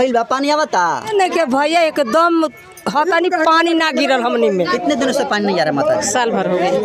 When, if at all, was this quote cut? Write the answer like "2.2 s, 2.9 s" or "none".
1.1 s, 4.7 s